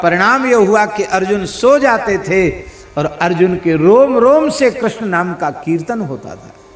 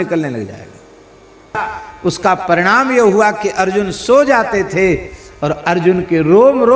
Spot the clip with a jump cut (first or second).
second